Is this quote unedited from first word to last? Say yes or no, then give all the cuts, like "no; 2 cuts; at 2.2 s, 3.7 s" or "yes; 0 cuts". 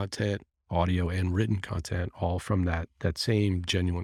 yes; 0 cuts